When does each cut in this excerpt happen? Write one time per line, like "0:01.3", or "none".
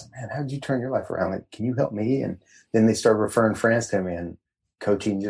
none